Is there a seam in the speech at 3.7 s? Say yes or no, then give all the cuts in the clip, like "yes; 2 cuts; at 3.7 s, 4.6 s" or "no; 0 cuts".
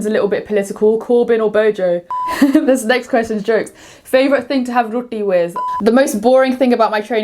no; 2 cuts; at 2.2 s, 5.6 s